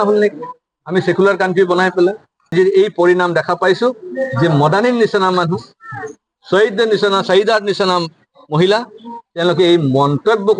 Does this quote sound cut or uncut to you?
cut